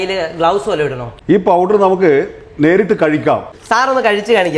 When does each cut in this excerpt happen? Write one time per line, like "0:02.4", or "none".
0:01.1
0:03.5